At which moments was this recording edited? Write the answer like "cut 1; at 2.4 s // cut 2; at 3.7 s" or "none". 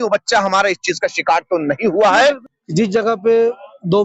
cut 1; at 2.2 s